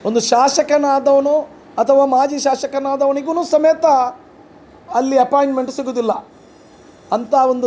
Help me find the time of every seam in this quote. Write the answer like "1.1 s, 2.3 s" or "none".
none